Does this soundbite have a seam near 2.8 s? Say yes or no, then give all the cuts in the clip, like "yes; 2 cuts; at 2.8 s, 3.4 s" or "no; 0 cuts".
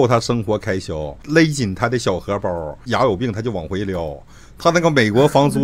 yes; 2 cuts; at 1.2 s, 2.8 s